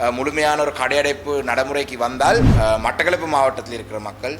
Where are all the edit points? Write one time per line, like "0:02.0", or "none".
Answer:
0:02.5